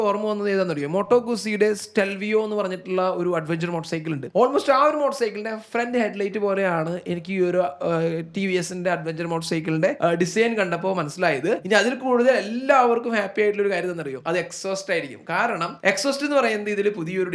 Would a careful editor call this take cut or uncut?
uncut